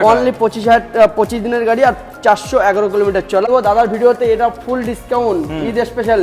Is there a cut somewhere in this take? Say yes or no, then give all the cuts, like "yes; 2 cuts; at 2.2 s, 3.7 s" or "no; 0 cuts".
yes; 1 cut; at 3.4 s